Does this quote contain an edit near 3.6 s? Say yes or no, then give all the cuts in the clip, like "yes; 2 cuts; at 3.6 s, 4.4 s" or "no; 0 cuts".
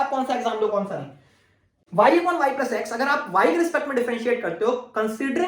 no; 1 cut; at 1.8 s